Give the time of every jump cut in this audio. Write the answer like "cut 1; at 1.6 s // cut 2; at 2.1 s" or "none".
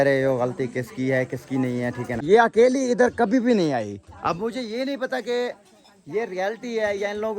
cut 1; at 2.1 s